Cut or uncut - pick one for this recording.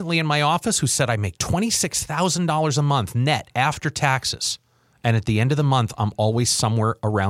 uncut